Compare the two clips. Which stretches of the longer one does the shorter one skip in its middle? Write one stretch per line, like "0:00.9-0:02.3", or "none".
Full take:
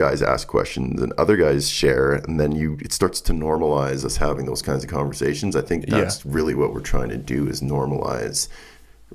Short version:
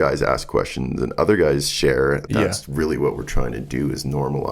0:02.3-0:05.8